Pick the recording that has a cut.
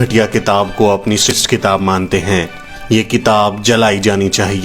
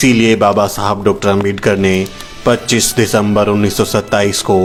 first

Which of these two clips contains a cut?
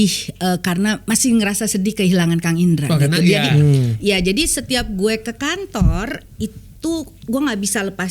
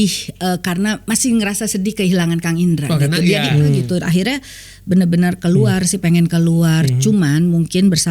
second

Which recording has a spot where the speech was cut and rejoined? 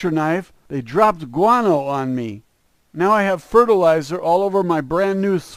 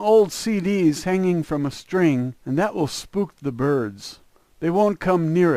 first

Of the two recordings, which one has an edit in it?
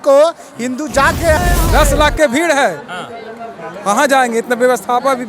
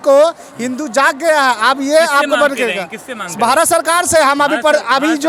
first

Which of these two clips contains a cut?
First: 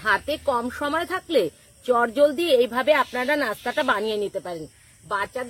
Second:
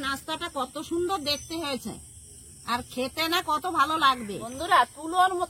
second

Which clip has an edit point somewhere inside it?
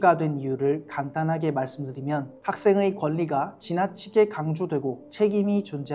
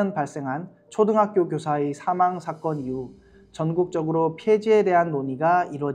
first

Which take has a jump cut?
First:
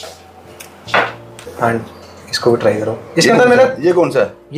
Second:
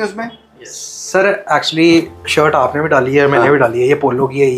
first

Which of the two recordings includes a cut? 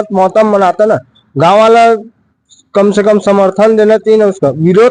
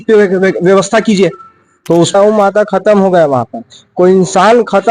second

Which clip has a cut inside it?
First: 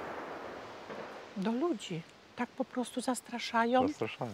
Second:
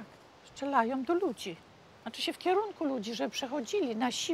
first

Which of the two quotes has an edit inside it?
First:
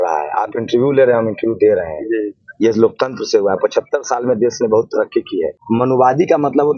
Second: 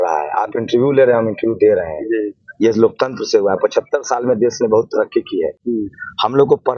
first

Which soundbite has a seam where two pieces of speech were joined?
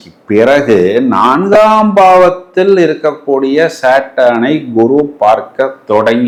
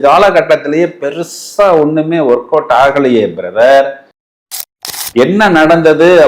second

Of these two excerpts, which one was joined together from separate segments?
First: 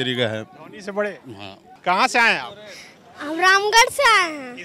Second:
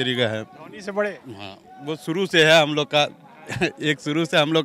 first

